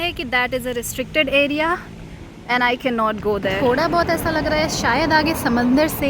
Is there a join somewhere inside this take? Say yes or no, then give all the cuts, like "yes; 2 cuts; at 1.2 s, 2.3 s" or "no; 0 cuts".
yes; 1 cut; at 3.6 s